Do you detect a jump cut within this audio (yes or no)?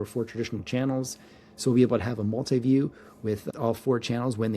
yes